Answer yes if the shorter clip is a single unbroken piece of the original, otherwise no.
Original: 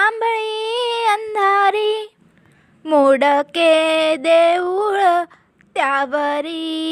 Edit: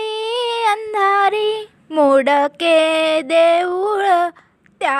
no